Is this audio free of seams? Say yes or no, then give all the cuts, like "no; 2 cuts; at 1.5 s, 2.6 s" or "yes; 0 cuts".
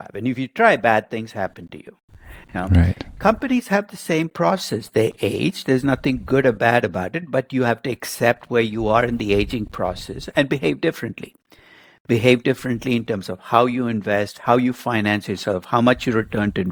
yes; 0 cuts